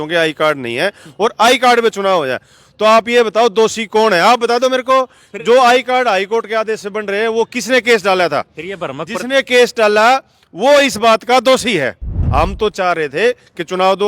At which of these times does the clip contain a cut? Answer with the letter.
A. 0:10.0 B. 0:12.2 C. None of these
B